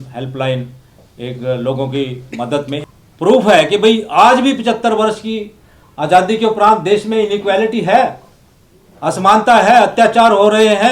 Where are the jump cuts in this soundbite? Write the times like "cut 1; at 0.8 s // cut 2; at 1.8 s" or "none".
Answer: cut 1; at 2.8 s

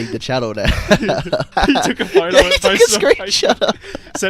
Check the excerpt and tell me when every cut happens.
cut 1; at 1.5 s

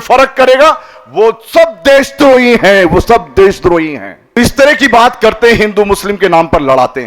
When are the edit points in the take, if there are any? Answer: cut 1; at 4.4 s

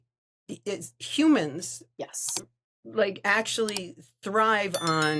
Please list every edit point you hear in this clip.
none

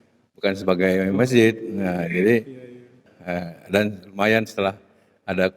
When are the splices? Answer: cut 1; at 3.1 s

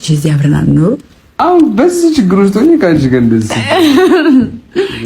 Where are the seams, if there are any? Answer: cut 1; at 1.4 s

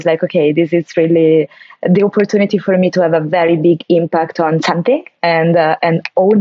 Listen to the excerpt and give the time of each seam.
none

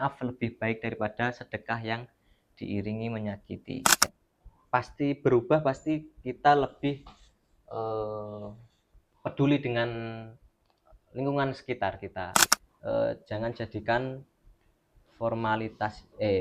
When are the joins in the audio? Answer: cut 1; at 4.1 s // cut 2; at 12.4 s

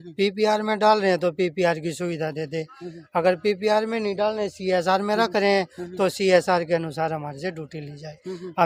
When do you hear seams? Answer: none

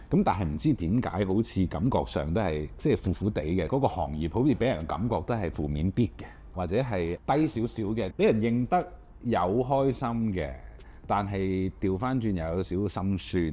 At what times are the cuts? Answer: none

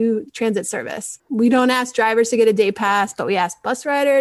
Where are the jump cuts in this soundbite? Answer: cut 1; at 1.2 s

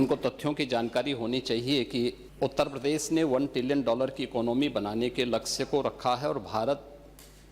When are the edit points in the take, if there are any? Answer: cut 1; at 2.2 s

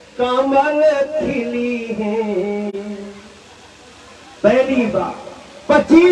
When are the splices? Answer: none

